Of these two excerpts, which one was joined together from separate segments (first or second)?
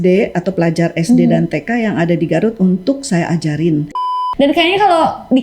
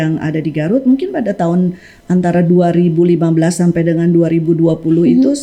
first